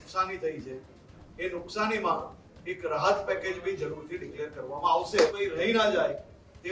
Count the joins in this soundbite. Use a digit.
1